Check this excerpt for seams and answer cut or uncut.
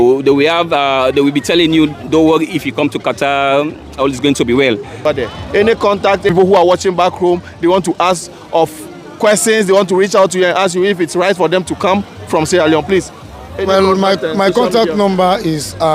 cut